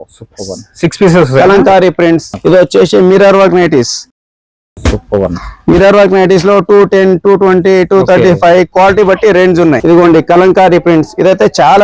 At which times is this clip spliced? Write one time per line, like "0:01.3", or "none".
0:02.3
0:09.8